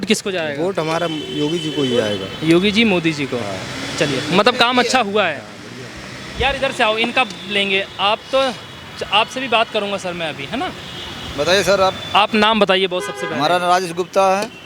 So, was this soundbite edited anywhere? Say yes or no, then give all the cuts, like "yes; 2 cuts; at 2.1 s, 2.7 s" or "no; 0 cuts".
no; 0 cuts